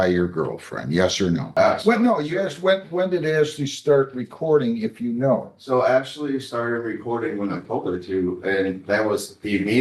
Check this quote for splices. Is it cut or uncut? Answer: cut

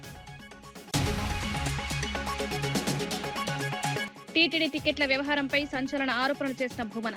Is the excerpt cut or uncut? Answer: cut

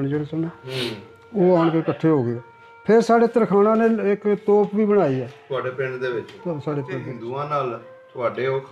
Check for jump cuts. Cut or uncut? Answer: cut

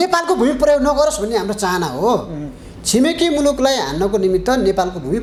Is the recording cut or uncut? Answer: uncut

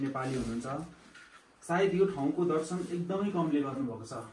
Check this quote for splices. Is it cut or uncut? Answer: uncut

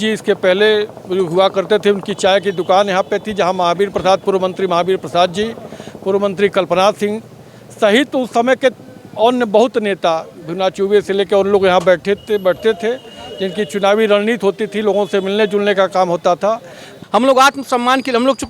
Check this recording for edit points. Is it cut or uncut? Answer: cut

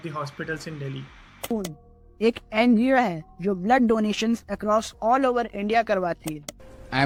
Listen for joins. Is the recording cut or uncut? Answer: uncut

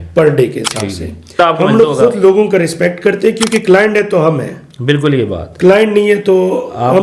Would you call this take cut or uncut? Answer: cut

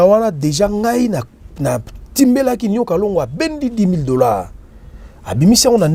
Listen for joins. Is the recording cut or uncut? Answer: uncut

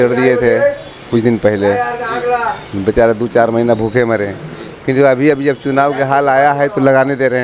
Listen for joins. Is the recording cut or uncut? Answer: uncut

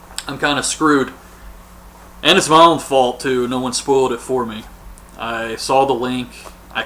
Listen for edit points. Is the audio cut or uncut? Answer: cut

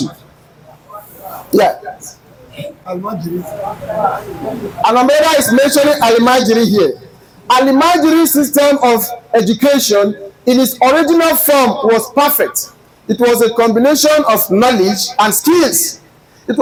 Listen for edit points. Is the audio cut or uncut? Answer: uncut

